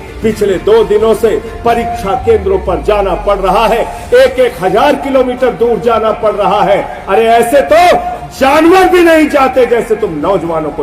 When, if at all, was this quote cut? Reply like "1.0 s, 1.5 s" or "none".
none